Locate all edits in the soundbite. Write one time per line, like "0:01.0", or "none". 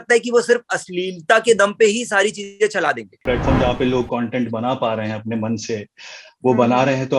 0:03.1